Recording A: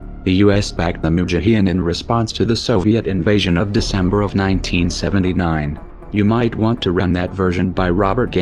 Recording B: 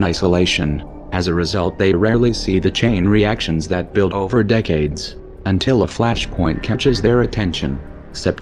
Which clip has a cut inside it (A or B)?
B